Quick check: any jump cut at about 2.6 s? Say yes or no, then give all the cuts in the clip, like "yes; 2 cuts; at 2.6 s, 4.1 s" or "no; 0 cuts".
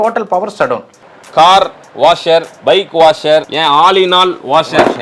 no; 1 cut; at 1.0 s